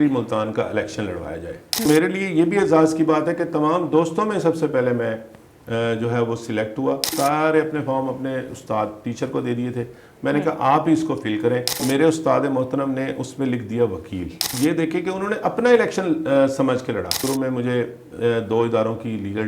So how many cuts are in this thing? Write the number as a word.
five